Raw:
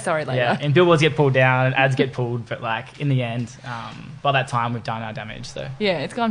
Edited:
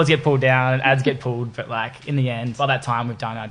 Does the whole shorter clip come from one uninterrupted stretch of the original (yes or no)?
no